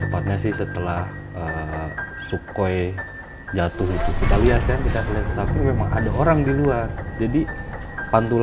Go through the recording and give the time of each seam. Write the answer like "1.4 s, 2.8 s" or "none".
4.2 s